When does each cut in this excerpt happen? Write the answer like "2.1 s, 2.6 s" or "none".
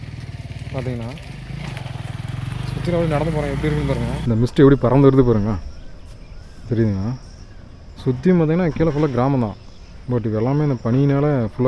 4.2 s